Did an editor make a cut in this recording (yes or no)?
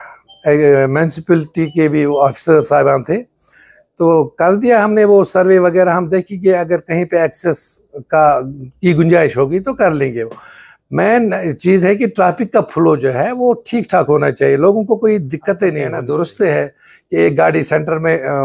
yes